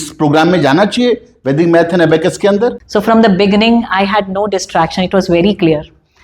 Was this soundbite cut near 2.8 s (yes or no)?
yes